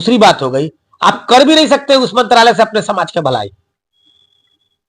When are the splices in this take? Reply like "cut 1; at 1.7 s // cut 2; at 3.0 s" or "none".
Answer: none